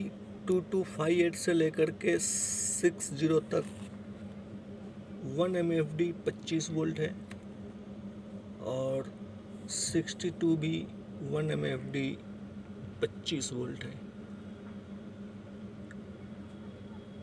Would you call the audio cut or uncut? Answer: uncut